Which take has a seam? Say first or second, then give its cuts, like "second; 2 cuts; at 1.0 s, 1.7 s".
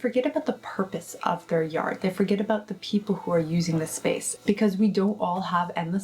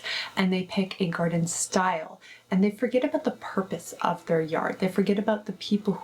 first; 1 cut; at 4.3 s